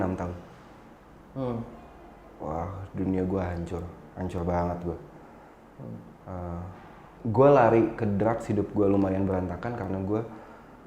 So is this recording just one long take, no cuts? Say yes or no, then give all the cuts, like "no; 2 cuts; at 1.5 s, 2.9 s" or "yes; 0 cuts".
no; 1 cut; at 7.1 s